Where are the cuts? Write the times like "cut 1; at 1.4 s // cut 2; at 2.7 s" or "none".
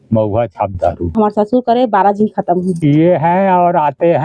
cut 1; at 1.1 s // cut 2; at 2.7 s

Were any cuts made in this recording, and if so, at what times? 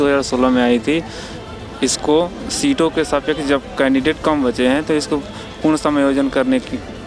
none

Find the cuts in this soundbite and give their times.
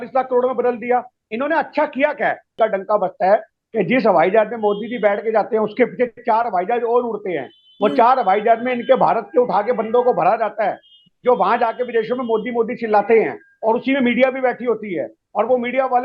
cut 1; at 2.5 s

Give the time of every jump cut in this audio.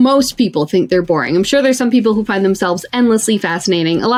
none

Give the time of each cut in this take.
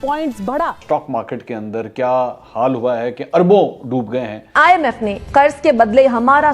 cut 1; at 1.0 s // cut 2; at 4.6 s

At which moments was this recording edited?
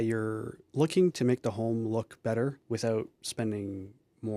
cut 1; at 2.6 s // cut 2; at 3.2 s

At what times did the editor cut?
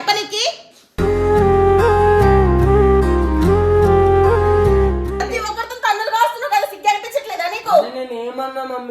cut 1; at 5.3 s

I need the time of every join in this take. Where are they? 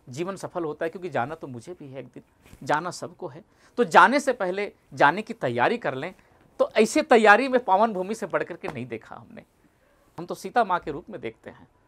cut 1; at 10.2 s

